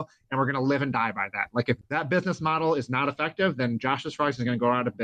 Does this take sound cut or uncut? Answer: cut